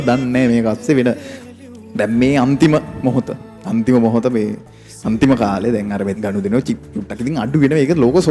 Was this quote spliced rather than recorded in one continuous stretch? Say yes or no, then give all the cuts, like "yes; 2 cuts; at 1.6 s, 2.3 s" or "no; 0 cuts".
yes; 2 cuts; at 1.3 s, 6.1 s